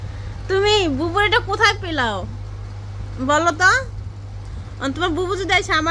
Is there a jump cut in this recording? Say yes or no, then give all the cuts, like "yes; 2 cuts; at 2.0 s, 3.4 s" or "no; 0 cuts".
no; 0 cuts